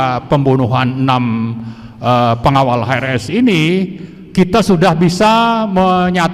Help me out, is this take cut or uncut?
uncut